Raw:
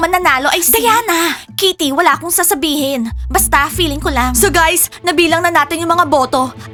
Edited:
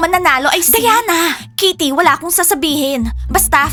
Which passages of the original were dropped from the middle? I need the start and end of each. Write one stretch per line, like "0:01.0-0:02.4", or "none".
none